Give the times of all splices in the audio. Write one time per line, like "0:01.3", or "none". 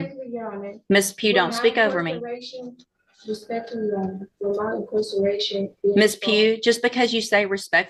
none